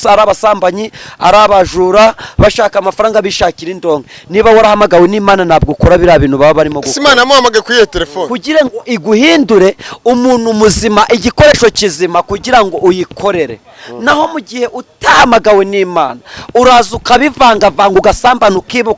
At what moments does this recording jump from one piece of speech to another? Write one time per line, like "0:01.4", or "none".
0:08.3